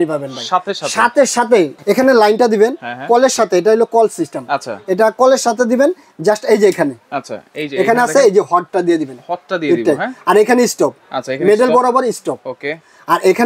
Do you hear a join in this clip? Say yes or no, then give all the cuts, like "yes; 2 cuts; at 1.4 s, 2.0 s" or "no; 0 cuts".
yes; 1 cut; at 1.8 s